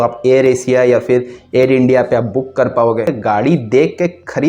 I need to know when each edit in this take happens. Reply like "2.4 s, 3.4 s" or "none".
3.1 s

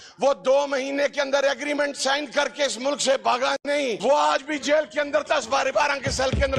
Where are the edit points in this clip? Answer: 4.0 s

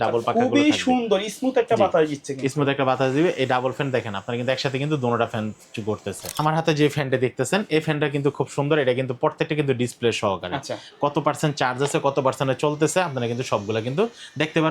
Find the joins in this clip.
6.4 s

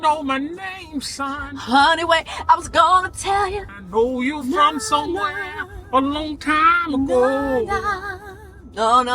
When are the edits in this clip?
3.8 s

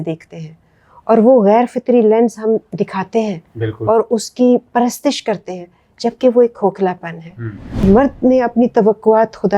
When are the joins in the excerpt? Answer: 7.8 s

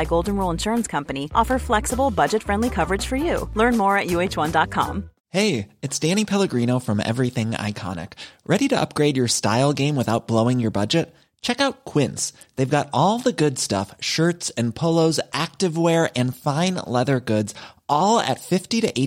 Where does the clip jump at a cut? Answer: none

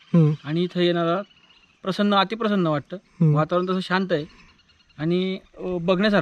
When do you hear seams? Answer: none

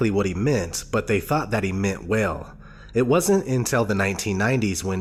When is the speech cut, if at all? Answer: none

